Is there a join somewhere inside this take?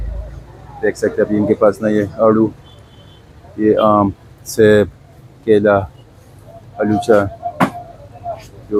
no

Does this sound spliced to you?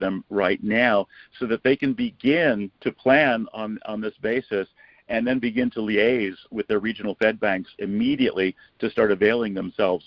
yes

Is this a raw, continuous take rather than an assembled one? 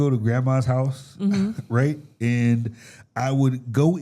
yes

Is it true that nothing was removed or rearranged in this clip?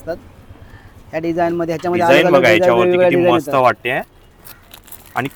yes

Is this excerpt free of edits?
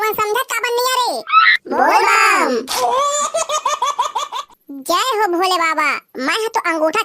no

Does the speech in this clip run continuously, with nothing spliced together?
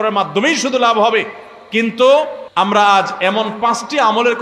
no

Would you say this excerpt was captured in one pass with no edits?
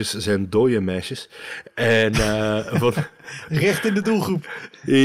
yes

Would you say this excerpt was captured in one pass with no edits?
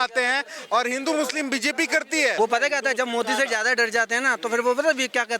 no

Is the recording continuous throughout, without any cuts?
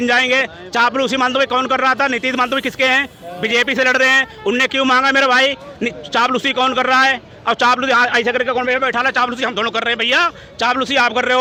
yes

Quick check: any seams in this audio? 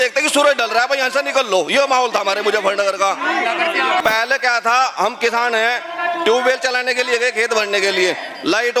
yes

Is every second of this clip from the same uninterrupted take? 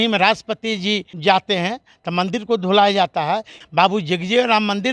no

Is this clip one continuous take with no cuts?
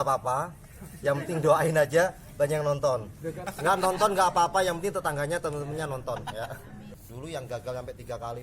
no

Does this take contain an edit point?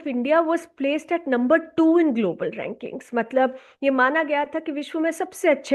no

